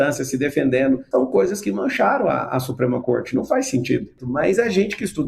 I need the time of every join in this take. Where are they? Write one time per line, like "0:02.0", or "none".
0:01.0
0:04.2